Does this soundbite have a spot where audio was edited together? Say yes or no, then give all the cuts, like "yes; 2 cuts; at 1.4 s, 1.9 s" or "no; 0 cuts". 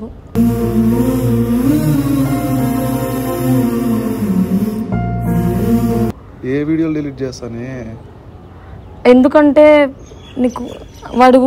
no; 0 cuts